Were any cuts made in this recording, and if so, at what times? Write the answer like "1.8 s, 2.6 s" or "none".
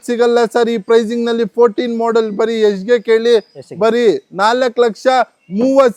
none